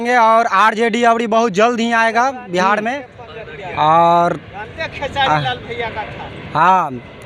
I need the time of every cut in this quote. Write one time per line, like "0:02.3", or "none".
none